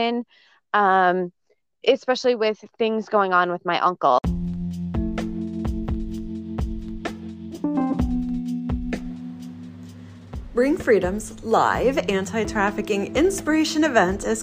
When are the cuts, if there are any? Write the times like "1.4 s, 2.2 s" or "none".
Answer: 4.3 s